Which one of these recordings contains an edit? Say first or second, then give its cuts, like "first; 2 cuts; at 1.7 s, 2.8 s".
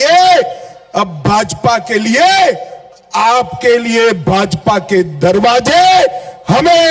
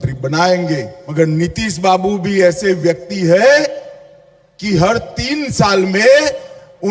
second; 1 cut; at 1.0 s